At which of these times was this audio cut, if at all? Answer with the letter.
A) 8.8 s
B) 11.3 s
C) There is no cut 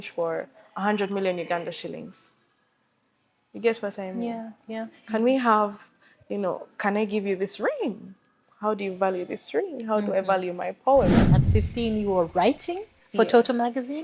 B